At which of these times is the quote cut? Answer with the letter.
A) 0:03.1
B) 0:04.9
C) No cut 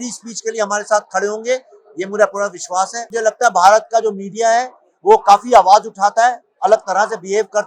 A